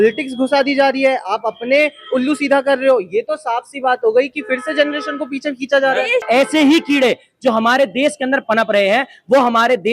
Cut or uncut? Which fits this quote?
cut